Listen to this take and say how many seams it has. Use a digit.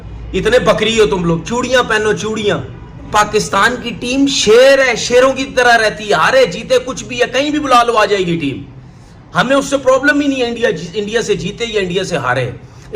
1